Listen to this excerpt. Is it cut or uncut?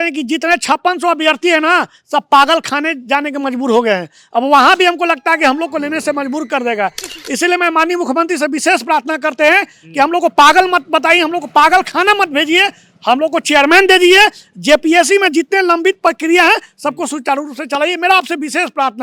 uncut